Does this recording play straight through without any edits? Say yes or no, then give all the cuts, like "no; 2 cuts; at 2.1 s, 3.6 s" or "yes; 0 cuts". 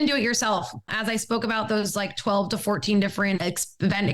no; 2 cuts; at 0.9 s, 3.4 s